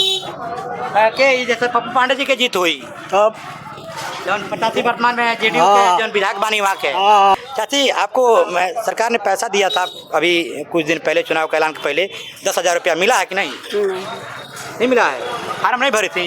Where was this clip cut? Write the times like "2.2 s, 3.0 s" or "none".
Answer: 7.3 s